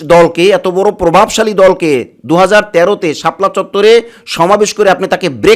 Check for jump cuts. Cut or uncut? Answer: uncut